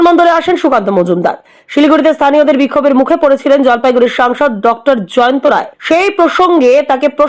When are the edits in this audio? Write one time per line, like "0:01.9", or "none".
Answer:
0:05.7